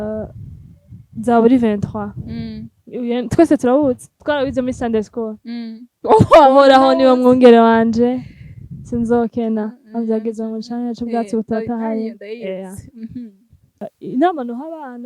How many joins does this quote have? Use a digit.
1